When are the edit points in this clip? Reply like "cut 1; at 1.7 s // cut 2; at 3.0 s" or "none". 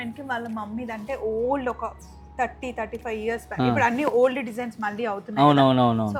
none